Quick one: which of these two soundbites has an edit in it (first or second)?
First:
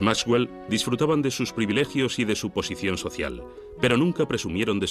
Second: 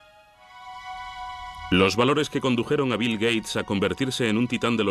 second